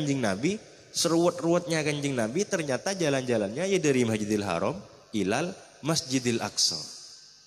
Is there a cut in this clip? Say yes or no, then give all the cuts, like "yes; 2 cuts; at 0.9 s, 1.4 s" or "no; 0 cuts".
no; 0 cuts